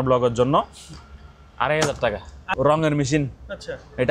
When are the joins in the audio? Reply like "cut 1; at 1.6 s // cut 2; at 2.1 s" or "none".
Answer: cut 1; at 2.4 s